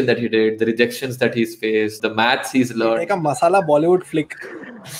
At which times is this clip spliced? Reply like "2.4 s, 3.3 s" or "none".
3.0 s